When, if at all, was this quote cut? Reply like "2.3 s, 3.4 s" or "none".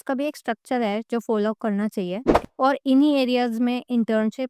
2.3 s